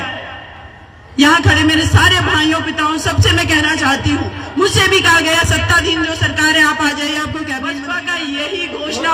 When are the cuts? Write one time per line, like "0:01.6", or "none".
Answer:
0:07.9